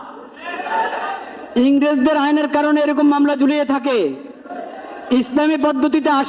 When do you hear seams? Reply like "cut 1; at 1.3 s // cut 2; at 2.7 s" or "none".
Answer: none